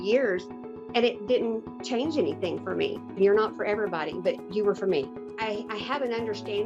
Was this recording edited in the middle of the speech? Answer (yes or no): yes